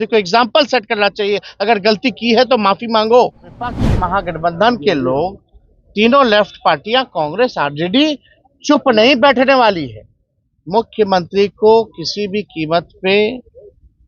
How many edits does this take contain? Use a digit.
1